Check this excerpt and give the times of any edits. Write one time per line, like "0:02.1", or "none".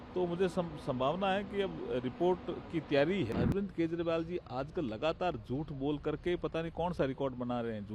0:03.3